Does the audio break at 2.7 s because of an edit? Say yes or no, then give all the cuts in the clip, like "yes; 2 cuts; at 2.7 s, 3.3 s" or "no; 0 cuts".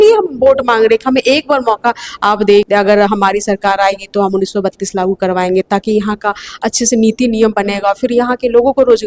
yes; 1 cut; at 2.7 s